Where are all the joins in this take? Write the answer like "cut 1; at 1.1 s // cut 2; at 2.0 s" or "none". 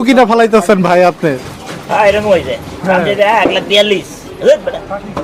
none